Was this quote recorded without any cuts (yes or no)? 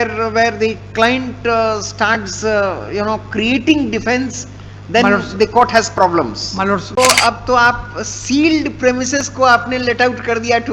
no